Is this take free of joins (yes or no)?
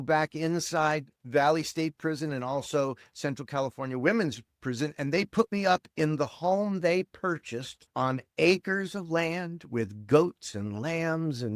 no